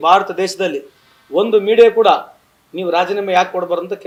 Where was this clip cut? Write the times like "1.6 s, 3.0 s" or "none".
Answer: none

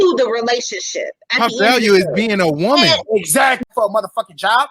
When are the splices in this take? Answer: 3.7 s

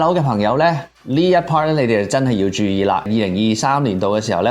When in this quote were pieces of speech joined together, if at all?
3.1 s

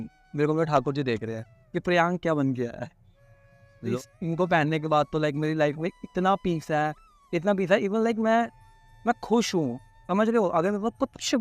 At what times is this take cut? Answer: 3.9 s

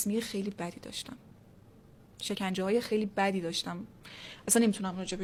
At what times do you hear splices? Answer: none

